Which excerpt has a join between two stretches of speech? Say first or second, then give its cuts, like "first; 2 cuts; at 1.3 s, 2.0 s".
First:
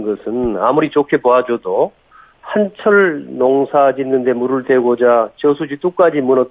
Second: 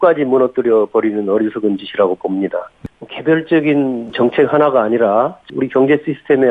second; 3 cuts; at 2.7 s, 4.1 s, 5.4 s